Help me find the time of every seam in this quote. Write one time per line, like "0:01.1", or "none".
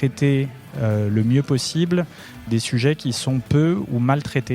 0:02.5